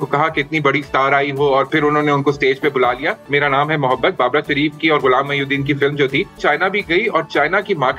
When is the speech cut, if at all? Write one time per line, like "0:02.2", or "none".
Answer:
0:01.7
0:03.2
0:06.4